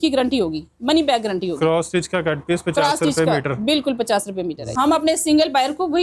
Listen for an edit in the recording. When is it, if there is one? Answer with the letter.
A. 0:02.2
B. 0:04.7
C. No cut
B